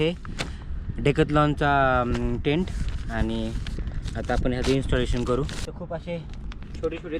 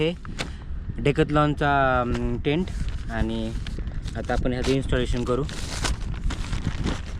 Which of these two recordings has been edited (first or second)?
first